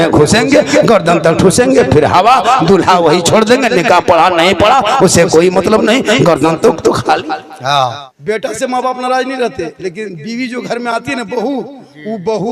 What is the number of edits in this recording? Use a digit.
1